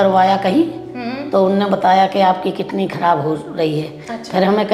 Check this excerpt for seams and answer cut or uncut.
uncut